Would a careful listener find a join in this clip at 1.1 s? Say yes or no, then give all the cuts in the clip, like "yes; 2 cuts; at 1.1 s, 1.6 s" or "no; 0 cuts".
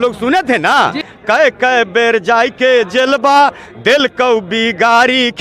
yes; 1 cut; at 1.1 s